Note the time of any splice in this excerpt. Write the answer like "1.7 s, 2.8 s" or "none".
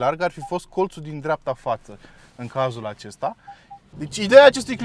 3.9 s